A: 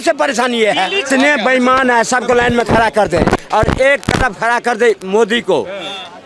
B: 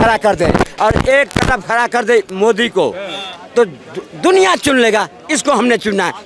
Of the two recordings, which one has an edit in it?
A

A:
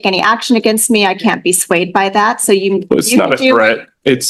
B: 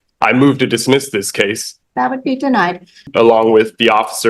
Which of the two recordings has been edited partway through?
B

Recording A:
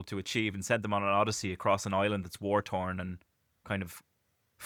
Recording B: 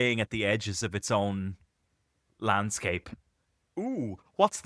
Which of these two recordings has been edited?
B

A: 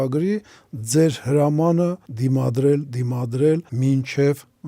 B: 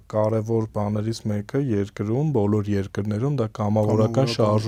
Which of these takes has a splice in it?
A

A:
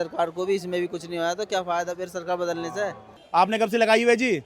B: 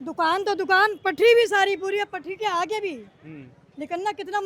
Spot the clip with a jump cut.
A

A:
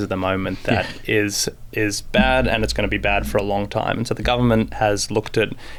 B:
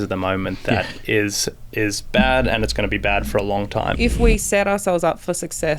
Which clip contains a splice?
B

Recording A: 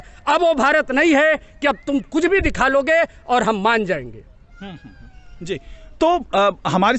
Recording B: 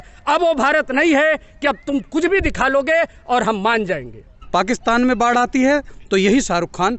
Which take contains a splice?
B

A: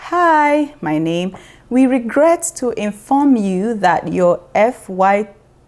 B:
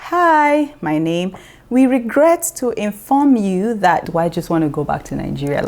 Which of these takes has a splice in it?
B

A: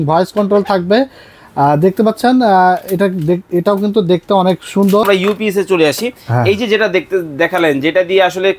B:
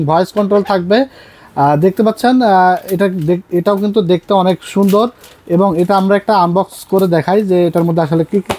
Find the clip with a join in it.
A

